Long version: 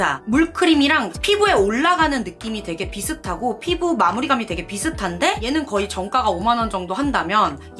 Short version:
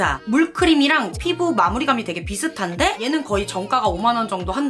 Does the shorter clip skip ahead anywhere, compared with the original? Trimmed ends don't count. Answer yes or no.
yes